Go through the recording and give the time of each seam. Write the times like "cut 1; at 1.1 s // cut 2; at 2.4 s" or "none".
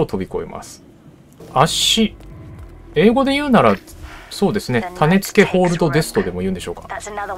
cut 1; at 1.4 s